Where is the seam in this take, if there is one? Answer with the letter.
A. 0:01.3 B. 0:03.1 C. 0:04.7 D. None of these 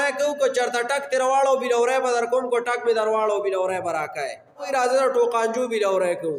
C